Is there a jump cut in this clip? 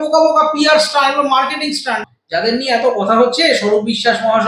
yes; 1 cut; at 1.9 s

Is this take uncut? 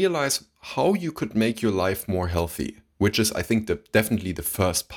yes; 0 cuts

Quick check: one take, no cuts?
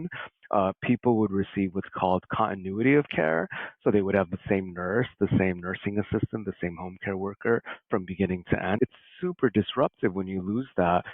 no; 1 cut; at 8.8 s

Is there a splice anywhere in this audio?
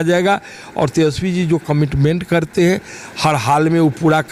no; 0 cuts

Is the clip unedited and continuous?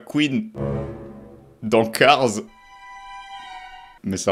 yes; 0 cuts

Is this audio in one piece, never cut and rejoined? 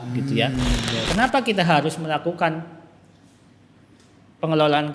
no; 1 cut; at 1.0 s

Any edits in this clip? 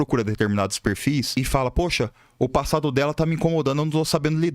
yes; 1 cut; at 1.3 s

